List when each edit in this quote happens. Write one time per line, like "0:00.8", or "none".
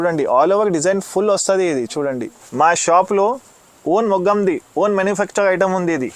0:02.4